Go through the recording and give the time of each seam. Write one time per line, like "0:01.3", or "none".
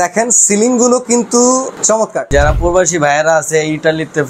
0:02.3